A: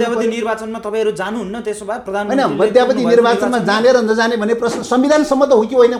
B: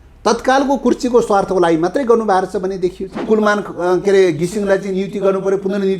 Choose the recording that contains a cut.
B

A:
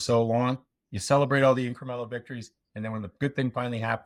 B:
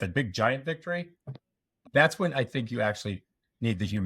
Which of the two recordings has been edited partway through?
B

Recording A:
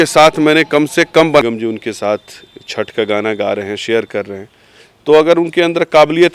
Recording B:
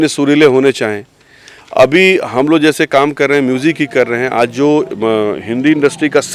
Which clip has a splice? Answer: A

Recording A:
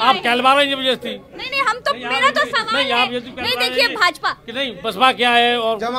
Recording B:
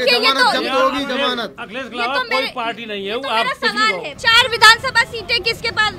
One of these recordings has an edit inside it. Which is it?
B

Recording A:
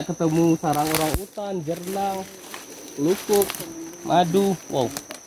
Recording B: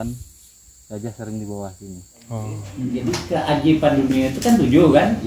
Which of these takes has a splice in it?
B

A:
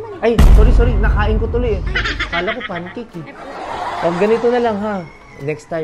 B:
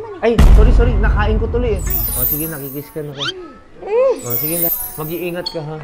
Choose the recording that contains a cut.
B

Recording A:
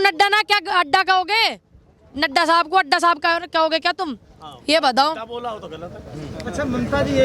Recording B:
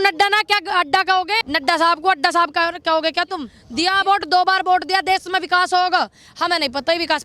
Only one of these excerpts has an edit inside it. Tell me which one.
B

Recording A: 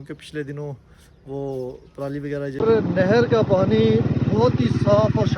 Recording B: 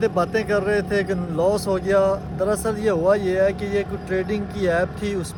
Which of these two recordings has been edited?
A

